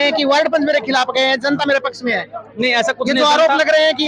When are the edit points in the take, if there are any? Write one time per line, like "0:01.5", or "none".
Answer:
none